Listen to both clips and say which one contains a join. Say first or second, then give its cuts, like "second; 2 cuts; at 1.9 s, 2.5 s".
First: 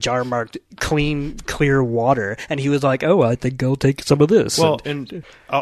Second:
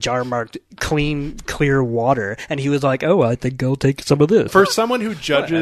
second; 1 cut; at 4.5 s